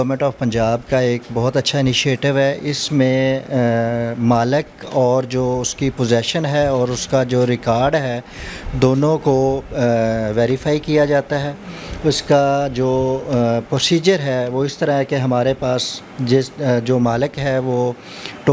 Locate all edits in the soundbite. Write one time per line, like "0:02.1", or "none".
none